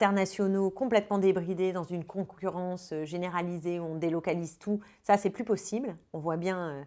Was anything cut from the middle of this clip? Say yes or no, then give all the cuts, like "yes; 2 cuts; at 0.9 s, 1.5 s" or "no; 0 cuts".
no; 0 cuts